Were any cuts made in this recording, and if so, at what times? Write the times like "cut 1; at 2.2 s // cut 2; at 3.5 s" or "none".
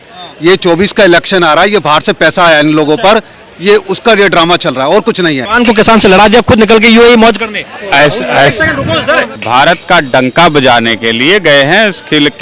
cut 1; at 5.5 s // cut 2; at 9.4 s